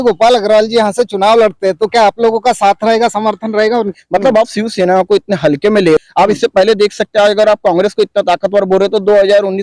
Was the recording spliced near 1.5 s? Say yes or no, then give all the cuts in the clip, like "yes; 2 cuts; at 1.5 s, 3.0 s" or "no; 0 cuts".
no; 2 cuts; at 4.0 s, 6.0 s